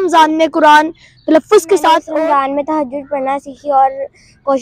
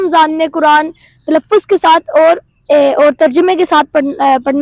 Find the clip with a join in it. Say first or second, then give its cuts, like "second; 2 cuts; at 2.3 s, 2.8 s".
first; 1 cut; at 2.1 s